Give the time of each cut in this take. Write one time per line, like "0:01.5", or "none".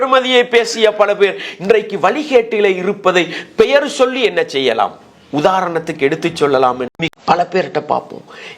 0:06.9